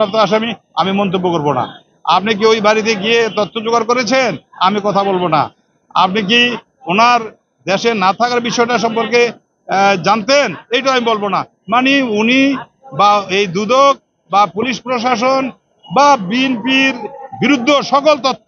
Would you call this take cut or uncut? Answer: uncut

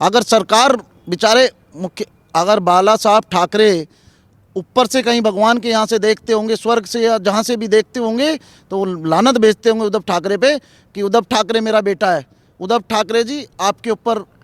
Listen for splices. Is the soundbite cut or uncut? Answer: uncut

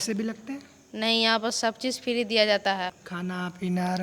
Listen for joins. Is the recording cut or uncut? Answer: cut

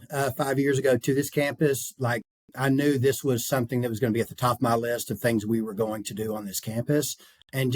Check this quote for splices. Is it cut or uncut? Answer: uncut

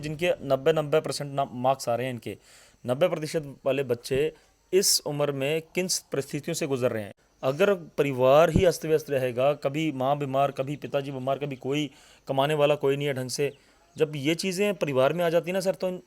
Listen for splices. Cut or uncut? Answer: cut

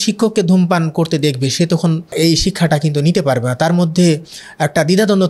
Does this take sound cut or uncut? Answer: cut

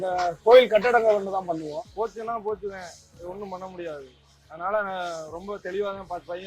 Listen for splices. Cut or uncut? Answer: cut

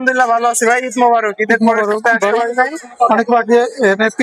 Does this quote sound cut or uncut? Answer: uncut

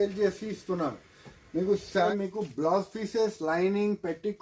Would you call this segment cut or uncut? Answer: cut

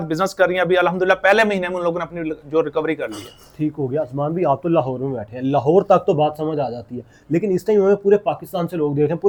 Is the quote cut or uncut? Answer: uncut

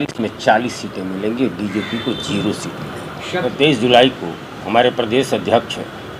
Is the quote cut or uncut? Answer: cut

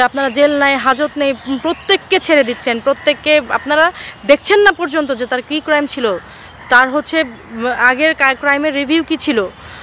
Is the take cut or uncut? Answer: uncut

